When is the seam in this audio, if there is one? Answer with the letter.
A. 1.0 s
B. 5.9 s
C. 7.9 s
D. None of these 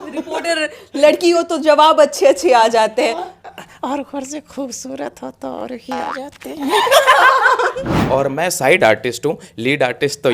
C